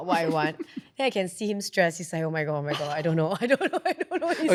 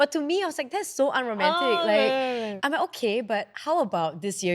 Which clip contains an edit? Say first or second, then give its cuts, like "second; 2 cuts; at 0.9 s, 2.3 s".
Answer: second; 1 cut; at 2.5 s